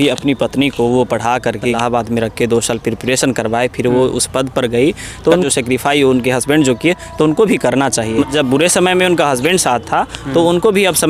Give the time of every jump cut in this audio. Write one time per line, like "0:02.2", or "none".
0:01.8
0:05.4
0:08.3